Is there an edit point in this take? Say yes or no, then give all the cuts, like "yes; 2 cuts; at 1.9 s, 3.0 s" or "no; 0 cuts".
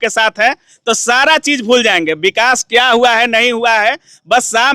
no; 0 cuts